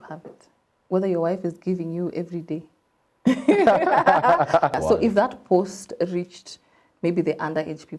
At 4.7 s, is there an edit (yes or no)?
yes